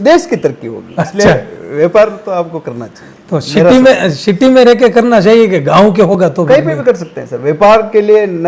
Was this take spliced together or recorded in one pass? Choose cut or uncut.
uncut